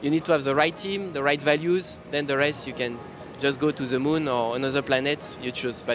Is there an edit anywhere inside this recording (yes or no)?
no